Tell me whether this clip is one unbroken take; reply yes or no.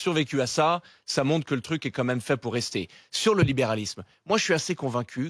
yes